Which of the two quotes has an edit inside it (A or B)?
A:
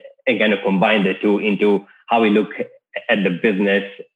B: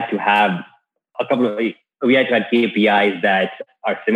B